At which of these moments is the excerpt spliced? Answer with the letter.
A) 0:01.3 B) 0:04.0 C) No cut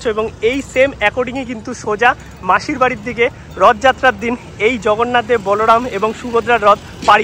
C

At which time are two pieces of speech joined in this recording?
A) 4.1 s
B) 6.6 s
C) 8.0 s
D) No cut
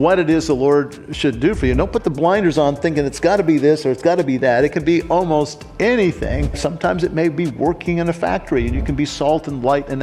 B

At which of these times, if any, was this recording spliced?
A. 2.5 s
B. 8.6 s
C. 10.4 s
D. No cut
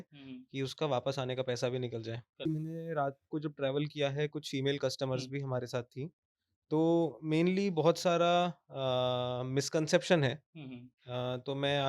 A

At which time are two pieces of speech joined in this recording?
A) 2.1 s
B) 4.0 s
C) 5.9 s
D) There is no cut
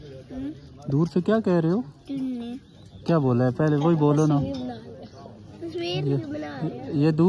D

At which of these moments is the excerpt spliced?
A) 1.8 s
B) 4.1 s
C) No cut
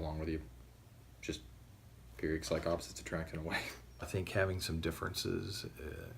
B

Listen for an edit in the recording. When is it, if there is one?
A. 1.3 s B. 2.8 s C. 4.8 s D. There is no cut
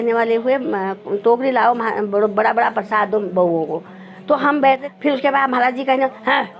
C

